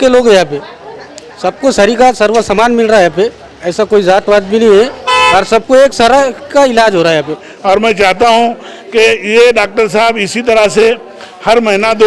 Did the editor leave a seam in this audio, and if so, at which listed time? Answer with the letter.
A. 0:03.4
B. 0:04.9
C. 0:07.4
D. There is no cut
C